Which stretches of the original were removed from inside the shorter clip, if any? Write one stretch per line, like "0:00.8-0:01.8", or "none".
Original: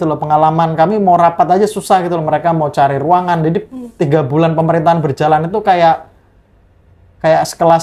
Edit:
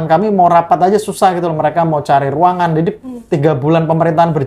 none